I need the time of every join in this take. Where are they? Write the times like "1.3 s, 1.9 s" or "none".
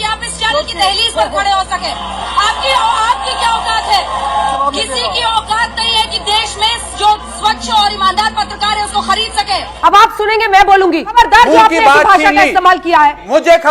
none